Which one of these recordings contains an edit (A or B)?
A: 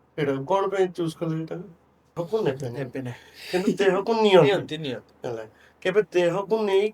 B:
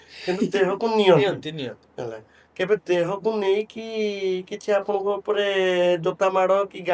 A